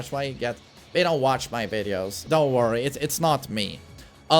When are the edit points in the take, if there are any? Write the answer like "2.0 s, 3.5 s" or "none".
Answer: 2.2 s